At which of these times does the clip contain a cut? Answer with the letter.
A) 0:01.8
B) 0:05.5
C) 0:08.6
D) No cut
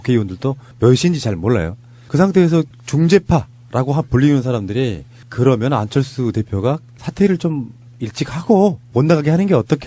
D